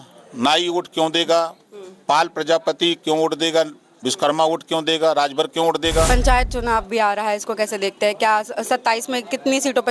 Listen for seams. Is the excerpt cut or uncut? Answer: cut